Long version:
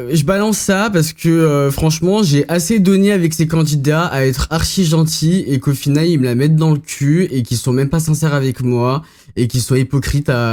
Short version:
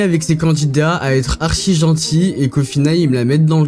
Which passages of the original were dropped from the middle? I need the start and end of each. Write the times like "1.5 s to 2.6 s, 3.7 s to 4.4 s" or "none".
none

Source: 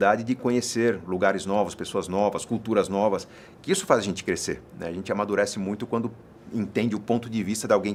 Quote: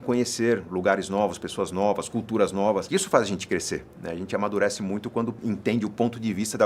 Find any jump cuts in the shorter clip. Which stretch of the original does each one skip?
3.2 s to 3.6 s, 6.1 s to 6.5 s

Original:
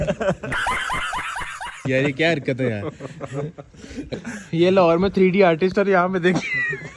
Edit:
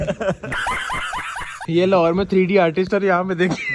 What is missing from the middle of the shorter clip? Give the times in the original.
1.6 s to 4.4 s

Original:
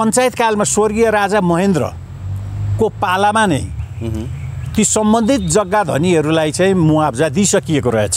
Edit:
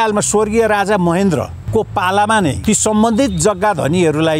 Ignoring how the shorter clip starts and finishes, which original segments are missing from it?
2.0 s to 2.6 s, 3.6 s to 4.7 s

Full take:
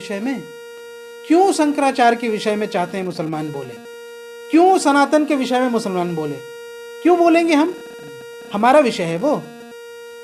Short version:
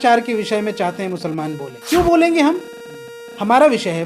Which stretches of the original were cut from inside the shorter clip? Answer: 3.6 s to 6.8 s

